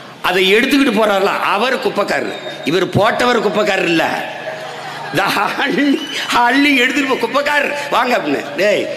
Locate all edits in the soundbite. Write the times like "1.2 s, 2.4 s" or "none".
none